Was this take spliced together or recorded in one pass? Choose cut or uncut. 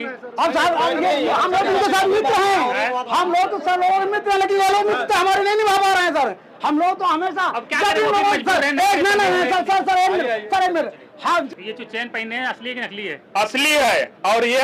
cut